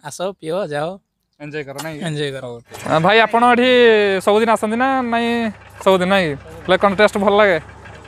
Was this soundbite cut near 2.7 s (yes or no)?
yes